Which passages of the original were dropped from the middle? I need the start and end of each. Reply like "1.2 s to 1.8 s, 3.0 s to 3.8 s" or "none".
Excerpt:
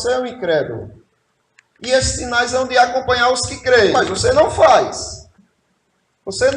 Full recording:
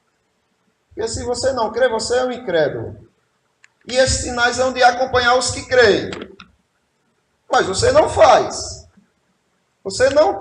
6.0 s to 7.5 s

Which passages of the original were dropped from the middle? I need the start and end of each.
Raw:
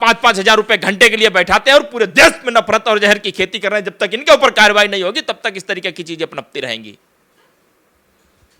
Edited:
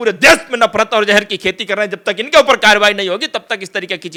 none

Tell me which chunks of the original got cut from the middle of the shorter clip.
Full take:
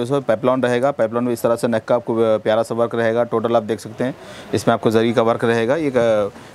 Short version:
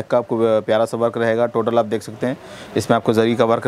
none

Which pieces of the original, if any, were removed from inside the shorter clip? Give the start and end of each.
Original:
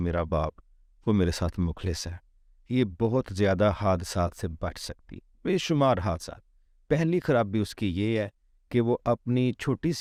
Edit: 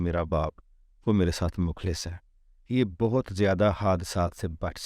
none

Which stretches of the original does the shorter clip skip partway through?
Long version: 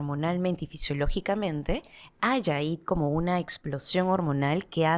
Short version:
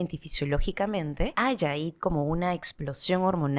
1.8 s to 2.2 s

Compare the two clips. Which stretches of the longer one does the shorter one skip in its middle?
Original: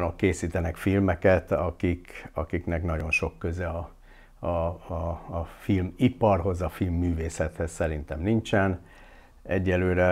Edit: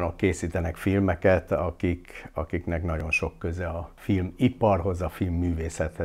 3.9 s to 5.5 s

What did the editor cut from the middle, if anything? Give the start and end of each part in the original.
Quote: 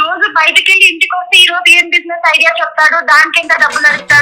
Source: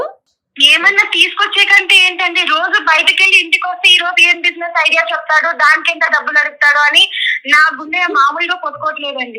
none

